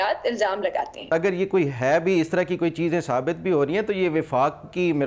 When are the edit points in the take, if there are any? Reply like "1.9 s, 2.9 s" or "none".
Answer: 1.1 s